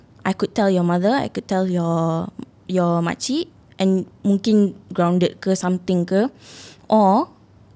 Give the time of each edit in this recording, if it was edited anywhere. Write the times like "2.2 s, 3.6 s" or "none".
none